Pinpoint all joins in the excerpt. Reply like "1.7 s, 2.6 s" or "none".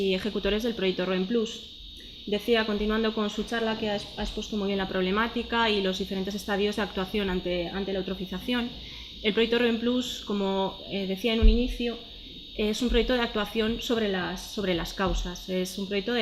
1.6 s